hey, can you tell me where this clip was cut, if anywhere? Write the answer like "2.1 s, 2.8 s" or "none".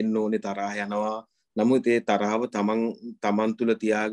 none